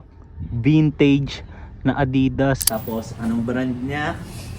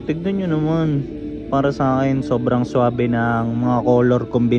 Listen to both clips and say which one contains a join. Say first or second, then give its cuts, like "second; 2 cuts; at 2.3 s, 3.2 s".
first; 1 cut; at 2.7 s